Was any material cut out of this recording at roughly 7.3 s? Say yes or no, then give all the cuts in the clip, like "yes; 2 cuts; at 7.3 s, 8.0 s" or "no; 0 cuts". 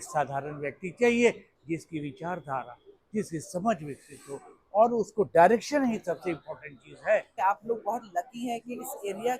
yes; 1 cut; at 7.3 s